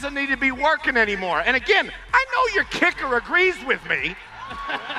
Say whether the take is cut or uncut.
uncut